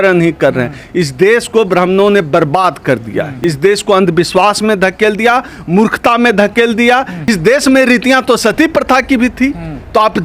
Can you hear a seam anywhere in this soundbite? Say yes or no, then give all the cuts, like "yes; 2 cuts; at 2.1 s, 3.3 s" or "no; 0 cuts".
yes; 2 cuts; at 3.3 s, 7.3 s